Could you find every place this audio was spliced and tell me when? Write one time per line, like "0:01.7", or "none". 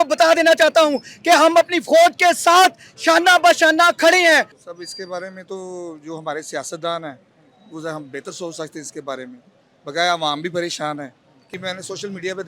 0:04.5
0:11.5